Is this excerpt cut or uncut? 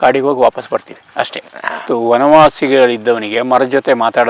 uncut